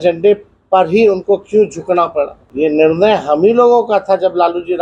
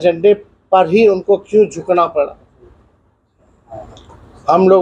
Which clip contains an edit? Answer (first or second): first